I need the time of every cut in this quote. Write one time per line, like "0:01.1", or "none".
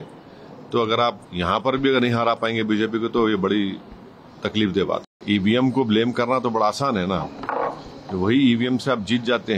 0:01.3
0:05.1